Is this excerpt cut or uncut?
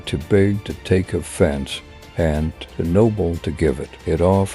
uncut